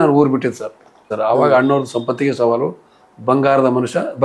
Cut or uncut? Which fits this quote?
cut